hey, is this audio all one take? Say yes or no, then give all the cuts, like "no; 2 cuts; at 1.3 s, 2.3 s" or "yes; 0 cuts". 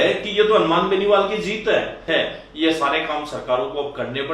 no; 1 cut; at 2.1 s